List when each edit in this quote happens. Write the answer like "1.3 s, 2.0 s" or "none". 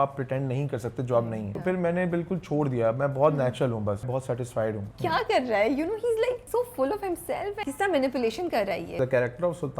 1.5 s, 4.4 s, 6.4 s, 7.6 s, 8.9 s